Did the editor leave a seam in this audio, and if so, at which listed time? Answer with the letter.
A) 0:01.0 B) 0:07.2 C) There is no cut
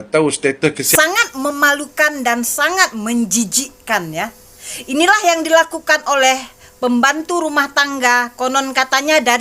A